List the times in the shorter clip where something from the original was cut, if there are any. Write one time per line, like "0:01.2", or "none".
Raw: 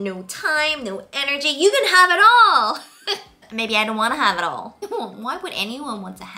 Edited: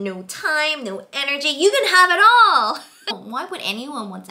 0:03.1